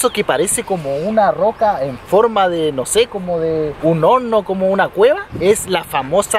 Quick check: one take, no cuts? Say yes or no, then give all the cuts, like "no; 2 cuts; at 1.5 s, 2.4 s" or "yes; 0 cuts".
yes; 0 cuts